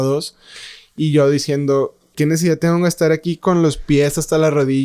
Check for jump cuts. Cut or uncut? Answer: cut